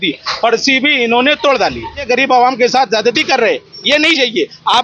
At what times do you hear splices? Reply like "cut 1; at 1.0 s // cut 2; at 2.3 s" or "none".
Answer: cut 1; at 2.0 s